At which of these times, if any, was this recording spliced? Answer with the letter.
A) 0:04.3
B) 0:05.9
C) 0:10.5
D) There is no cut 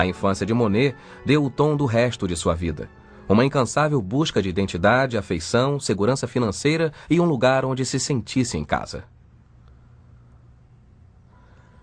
D